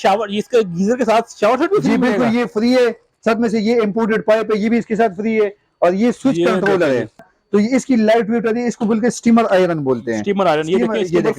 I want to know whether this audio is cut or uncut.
cut